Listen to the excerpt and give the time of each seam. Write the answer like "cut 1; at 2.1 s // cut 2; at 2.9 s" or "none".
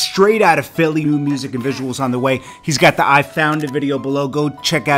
cut 1; at 1.0 s